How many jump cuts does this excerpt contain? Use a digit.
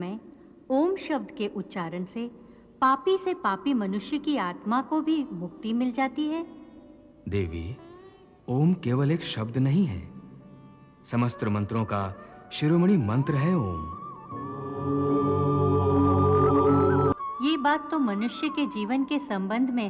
1